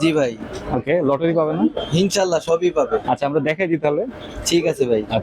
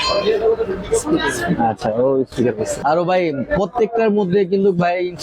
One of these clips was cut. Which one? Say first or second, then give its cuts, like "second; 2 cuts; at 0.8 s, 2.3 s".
second; 1 cut; at 2.8 s